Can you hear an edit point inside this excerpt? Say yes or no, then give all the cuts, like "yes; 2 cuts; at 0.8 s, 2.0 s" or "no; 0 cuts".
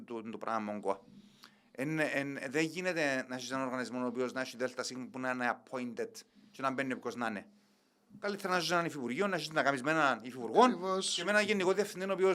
no; 0 cuts